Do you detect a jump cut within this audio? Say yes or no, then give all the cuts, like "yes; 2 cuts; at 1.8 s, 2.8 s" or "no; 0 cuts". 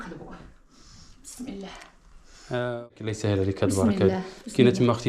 yes; 1 cut; at 2.9 s